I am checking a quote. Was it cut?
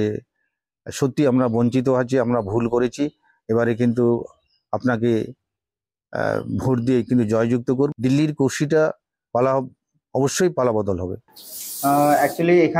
yes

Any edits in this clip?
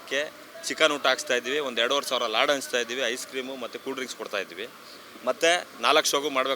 no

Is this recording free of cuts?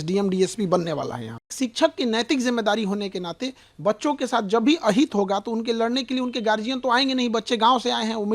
no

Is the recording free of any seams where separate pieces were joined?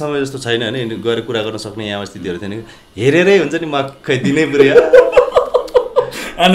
yes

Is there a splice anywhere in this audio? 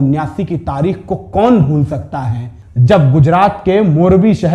no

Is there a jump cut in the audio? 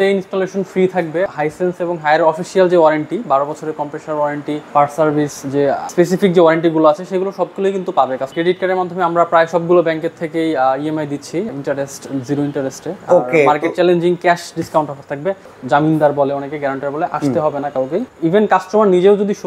yes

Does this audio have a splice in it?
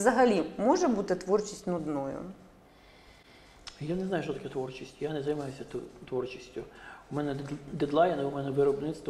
no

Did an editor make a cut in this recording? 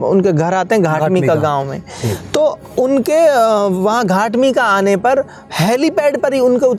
no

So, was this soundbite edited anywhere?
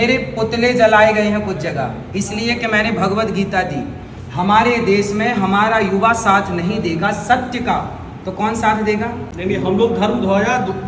no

